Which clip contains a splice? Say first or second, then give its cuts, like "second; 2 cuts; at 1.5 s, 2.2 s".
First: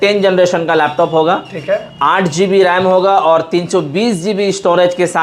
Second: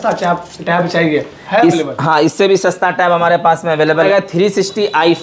second; 1 cut; at 4.1 s